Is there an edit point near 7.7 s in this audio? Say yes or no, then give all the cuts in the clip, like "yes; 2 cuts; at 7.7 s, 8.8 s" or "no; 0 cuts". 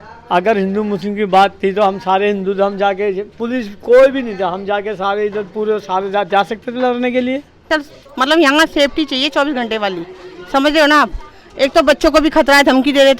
yes; 1 cut; at 7.7 s